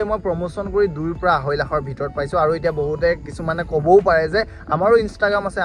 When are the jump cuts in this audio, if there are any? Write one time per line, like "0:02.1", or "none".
none